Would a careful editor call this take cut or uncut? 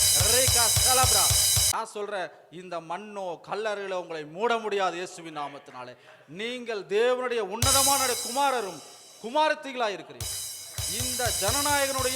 cut